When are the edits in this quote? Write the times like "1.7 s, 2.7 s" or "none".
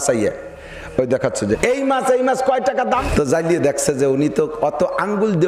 1.6 s, 3.1 s